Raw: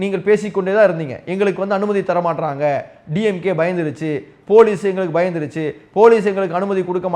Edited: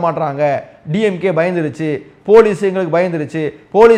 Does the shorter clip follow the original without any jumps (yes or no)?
yes